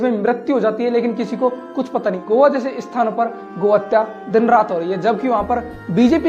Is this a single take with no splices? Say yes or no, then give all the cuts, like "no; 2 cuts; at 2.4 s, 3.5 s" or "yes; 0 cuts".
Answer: no; 1 cut; at 2.2 s